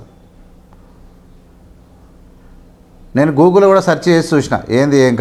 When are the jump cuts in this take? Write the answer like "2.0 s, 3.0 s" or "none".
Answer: none